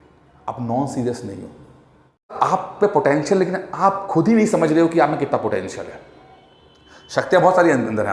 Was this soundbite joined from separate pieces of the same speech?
yes; 1 cut; at 2.3 s

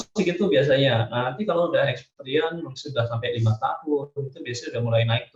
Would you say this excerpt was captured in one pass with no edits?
yes; 0 cuts

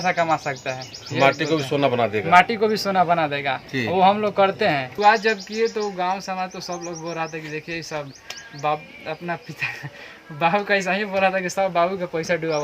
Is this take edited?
yes; 1 cut; at 4.9 s

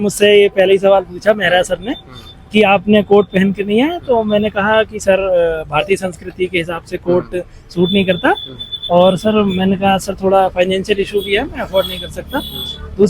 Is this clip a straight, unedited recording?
yes; 0 cuts

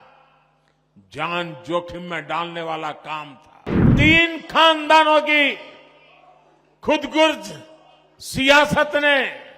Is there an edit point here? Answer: yes; 1 cut; at 3.9 s

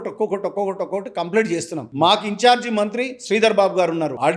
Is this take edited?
no; 0 cuts

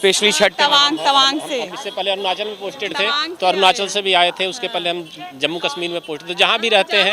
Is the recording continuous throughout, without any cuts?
yes; 0 cuts

